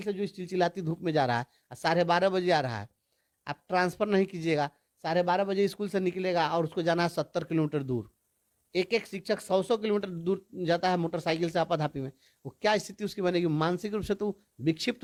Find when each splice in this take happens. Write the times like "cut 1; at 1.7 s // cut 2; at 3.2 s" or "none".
none